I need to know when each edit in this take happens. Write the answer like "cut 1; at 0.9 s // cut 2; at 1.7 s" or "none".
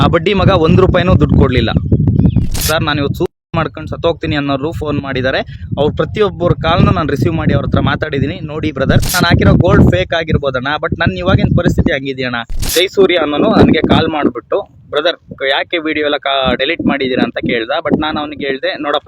cut 1; at 2.6 s // cut 2; at 9.1 s // cut 3; at 12.6 s

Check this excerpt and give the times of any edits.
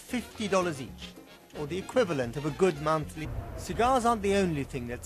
none

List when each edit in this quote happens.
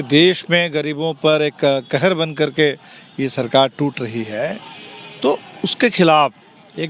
none

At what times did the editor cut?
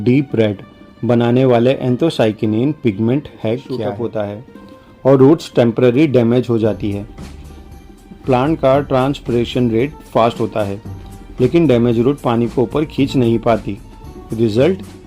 cut 1; at 4.0 s

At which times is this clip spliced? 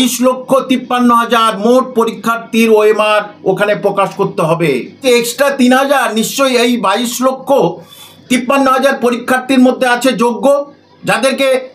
cut 1; at 5.0 s

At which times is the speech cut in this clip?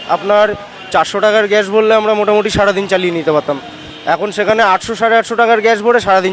none

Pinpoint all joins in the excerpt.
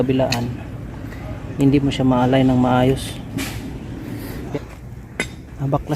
cut 1; at 4.5 s

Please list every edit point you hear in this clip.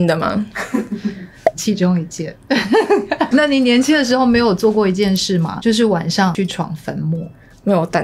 cut 1; at 3.3 s

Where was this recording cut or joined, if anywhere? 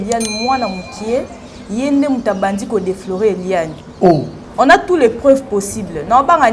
cut 1; at 4.4 s

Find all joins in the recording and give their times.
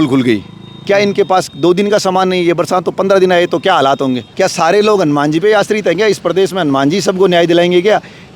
cut 1; at 4.2 s

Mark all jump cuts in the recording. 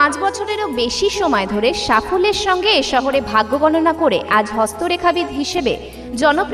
none

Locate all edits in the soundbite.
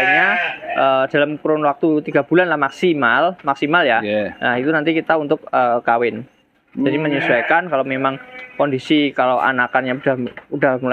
none

